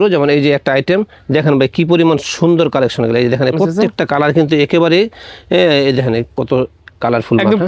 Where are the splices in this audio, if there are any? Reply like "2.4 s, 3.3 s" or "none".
none